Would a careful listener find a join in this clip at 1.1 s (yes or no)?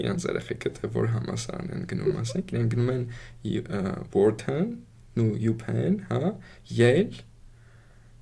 no